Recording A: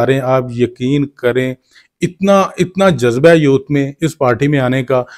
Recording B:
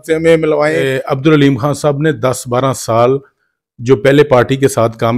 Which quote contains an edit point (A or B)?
B